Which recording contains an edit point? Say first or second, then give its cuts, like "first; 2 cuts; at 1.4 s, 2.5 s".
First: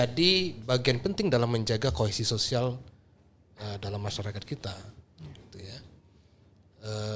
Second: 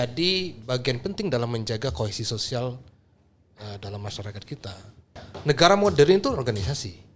second; 1 cut; at 5.3 s